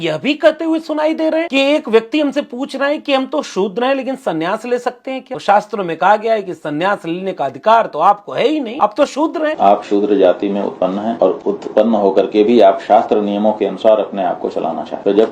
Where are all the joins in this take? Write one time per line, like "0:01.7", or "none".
0:01.5
0:05.3
0:08.7
0:09.5
0:11.1